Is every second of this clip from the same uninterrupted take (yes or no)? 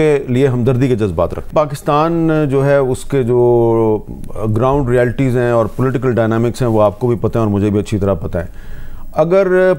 yes